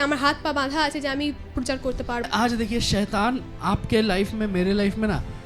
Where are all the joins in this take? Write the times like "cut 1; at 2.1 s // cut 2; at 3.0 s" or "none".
cut 1; at 2.3 s